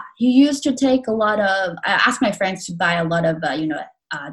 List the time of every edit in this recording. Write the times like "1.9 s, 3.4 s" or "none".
none